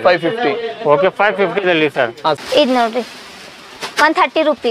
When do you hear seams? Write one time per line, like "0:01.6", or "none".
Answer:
0:02.4